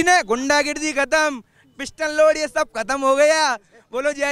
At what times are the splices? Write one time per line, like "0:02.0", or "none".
none

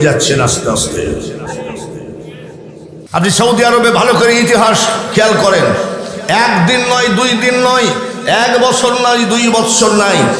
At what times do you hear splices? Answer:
0:03.0

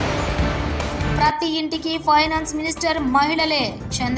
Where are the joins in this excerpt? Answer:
0:01.1

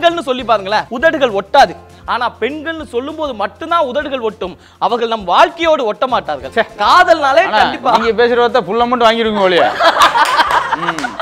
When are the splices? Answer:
0:00.9
0:01.8
0:06.7

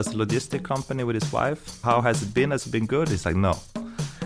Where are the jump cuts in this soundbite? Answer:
0:01.8

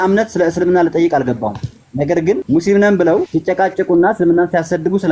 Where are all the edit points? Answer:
0:02.4
0:03.3

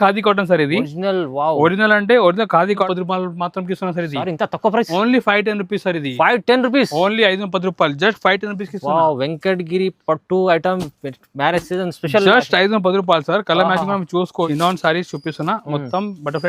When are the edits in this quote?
0:02.9
0:14.5

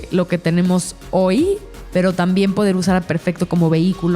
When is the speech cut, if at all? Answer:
0:01.7

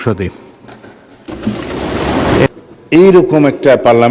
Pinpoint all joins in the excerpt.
0:02.4

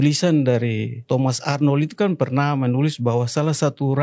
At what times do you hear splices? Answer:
0:00.9

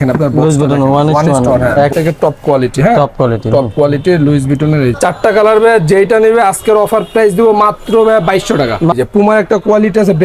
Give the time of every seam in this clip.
0:01.9
0:04.9
0:08.9

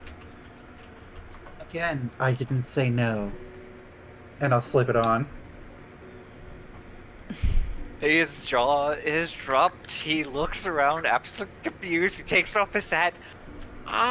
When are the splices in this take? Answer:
0:06.0

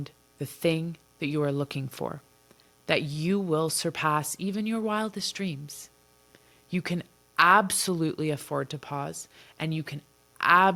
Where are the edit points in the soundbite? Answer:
none

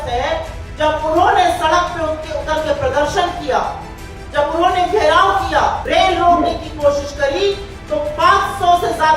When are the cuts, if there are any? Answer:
0:05.8

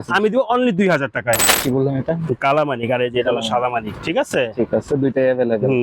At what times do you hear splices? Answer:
0:01.5

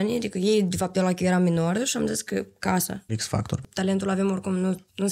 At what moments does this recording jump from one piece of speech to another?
0:03.3

